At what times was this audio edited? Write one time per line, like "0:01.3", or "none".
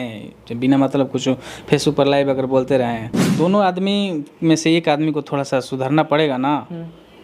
0:03.2